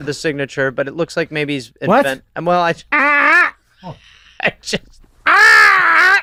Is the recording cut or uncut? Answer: uncut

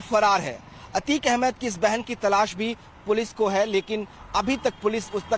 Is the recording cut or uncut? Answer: cut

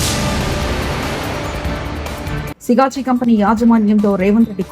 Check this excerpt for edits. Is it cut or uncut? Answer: cut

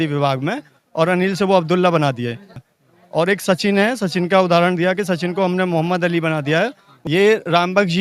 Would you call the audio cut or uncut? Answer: cut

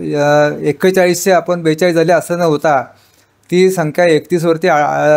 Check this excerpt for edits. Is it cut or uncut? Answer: uncut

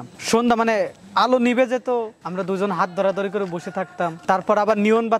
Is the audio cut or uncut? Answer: cut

